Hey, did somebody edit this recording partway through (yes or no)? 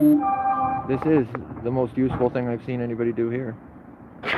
no